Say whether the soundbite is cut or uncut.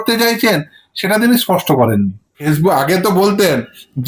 cut